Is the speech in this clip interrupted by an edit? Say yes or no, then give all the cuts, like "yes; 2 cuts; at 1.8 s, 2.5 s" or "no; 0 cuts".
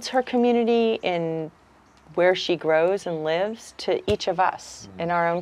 no; 0 cuts